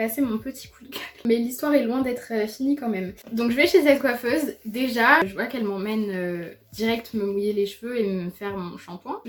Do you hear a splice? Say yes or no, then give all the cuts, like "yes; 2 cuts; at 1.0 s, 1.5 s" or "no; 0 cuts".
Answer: no; 0 cuts